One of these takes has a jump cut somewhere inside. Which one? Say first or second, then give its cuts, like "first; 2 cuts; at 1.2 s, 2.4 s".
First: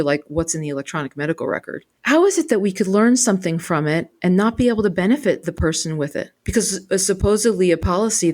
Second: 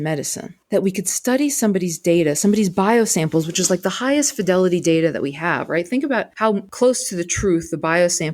first; 1 cut; at 1.9 s